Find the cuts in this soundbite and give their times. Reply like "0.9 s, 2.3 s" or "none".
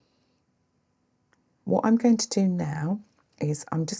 1.6 s

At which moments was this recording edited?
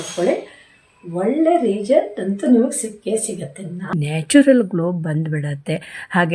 4.0 s

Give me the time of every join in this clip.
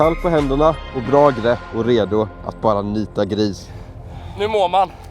0.9 s, 1.7 s, 3.6 s

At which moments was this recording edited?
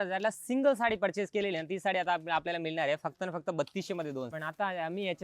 4.3 s

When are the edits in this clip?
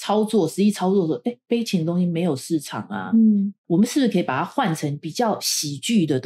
none

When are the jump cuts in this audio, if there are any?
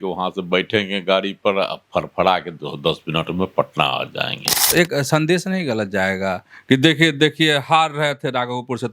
4.7 s

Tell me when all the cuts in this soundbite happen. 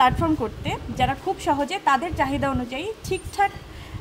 none

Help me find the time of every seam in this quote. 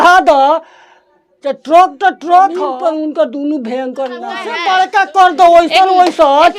2.7 s, 4.6 s

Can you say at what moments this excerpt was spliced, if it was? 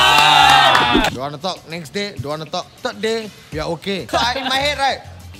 1.0 s, 2.7 s, 4.1 s

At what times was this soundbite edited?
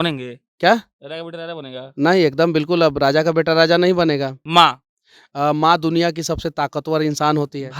4.4 s

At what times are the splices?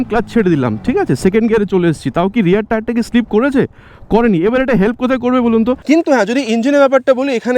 5.8 s

